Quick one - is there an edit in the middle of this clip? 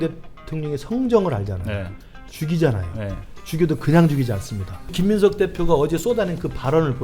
yes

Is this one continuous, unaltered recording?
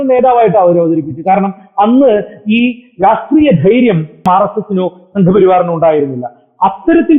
no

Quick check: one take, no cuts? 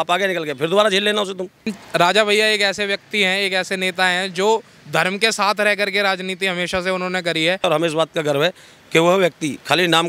no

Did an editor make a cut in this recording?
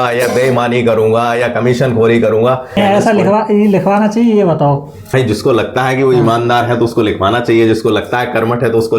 yes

